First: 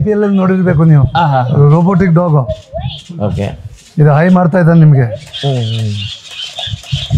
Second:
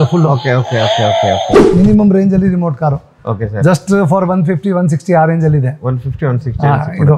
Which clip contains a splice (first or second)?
second